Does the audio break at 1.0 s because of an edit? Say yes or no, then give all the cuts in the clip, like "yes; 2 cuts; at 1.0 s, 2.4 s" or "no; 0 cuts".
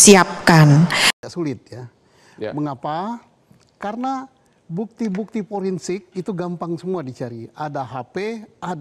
yes; 1 cut; at 1.0 s